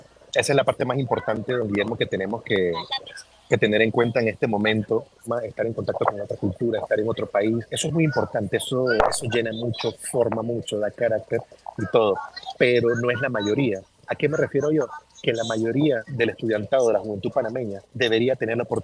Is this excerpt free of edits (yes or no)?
no